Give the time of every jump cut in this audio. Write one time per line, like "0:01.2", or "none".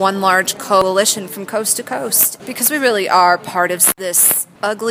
0:00.8
0:02.3
0:04.0